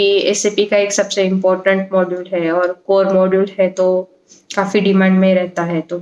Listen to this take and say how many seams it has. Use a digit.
0